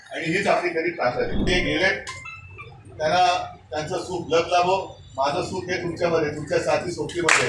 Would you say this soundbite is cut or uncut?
cut